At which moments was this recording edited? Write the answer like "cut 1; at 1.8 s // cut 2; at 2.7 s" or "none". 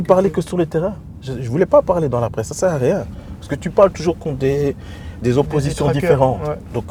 none